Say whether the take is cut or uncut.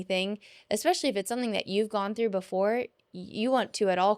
uncut